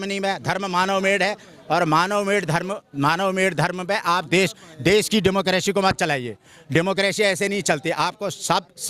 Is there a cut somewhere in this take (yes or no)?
no